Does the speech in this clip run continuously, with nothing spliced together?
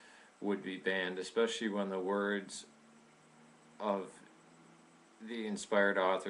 yes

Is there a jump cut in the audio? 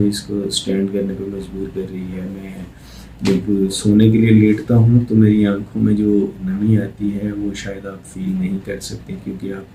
no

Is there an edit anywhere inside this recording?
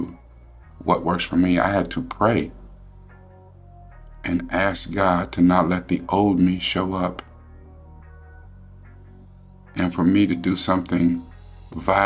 no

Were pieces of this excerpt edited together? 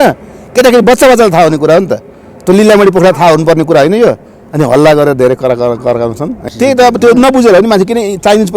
yes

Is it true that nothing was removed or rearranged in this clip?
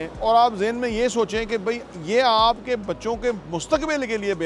yes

